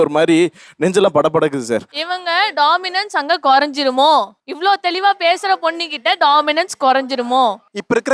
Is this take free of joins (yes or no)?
no